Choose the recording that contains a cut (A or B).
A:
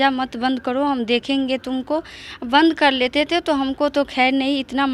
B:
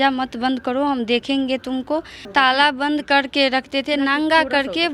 B